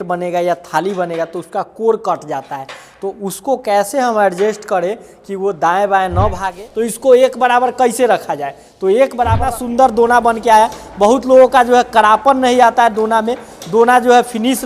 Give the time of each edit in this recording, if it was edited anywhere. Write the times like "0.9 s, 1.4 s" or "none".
6.5 s, 9.4 s